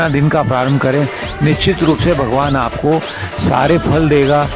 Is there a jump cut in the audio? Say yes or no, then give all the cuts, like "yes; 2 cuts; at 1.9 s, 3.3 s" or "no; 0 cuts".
no; 0 cuts